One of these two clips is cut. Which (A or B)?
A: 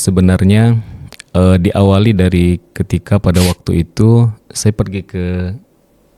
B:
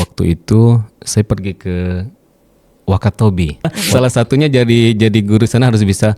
B